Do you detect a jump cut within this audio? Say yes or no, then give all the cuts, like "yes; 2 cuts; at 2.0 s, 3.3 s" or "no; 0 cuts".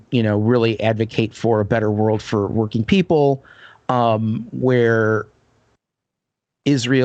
no; 0 cuts